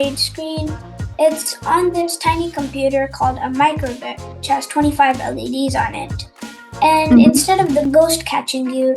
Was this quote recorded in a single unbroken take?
no; 1 cut; at 7.8 s

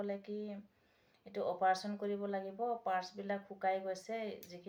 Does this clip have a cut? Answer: no; 0 cuts

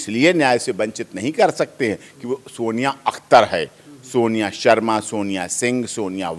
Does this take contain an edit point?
no; 0 cuts

